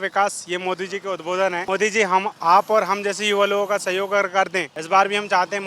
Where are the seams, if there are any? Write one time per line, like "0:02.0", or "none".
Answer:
0:01.6
0:04.7